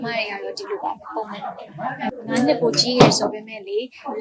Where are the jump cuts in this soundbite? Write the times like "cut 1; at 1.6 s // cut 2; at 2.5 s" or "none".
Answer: cut 1; at 1.6 s